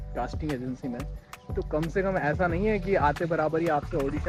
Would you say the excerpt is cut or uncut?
uncut